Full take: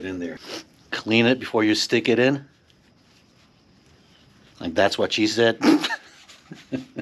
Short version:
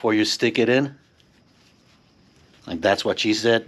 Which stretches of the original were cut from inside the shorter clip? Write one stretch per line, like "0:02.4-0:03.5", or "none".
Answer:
0:04.0-0:04.5

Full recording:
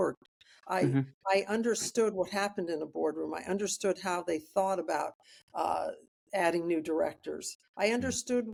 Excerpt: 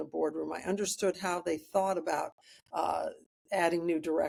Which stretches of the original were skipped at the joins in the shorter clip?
none

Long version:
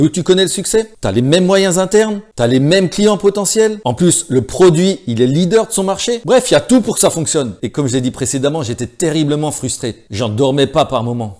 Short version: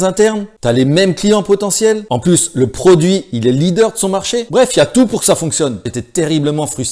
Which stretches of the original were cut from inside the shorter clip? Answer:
0:07.6-0:08.7

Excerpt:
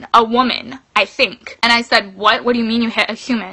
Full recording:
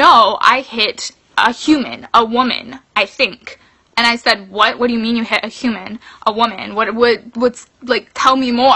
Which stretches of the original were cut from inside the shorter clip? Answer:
0:03.4-0:03.8

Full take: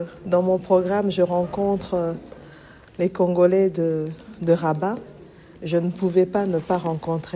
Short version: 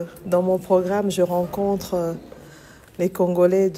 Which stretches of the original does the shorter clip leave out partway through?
none

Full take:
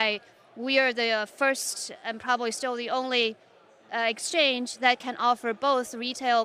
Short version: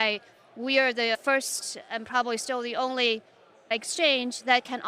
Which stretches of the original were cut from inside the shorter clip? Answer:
0:01.2-0:01.3
0:03.8-0:04.0

